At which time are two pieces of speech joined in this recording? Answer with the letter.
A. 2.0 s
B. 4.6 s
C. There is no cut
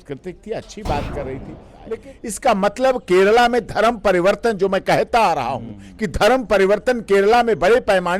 A